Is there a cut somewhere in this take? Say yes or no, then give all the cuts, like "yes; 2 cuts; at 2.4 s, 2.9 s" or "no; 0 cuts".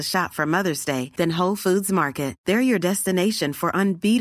no; 0 cuts